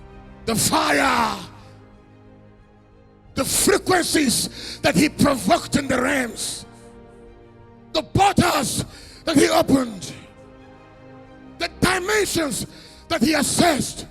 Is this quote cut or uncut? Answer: cut